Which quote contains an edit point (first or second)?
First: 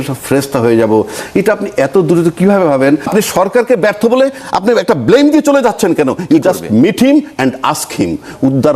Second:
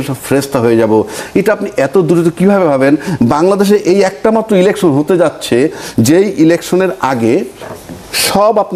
first